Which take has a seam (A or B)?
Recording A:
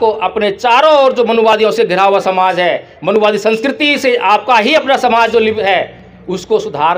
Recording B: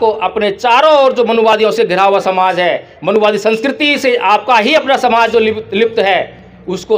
A